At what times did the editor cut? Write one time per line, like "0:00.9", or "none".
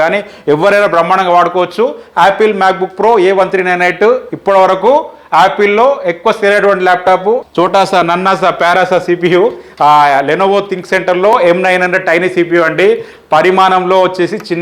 0:07.5